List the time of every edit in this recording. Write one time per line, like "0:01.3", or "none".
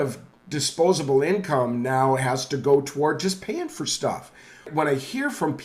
0:04.7